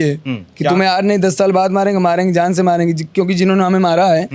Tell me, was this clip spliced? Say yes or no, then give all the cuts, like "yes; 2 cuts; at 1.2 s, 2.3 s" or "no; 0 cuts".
no; 0 cuts